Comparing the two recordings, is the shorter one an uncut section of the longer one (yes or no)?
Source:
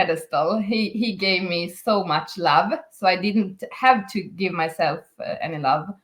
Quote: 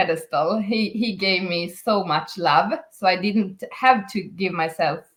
yes